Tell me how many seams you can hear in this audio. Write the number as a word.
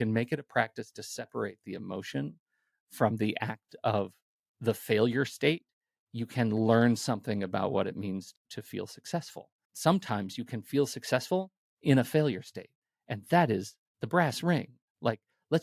two